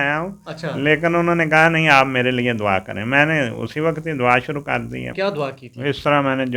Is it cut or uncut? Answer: uncut